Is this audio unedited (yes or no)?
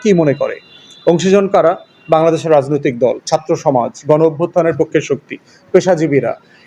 yes